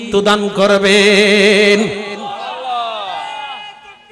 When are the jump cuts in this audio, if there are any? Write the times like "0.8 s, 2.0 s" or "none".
none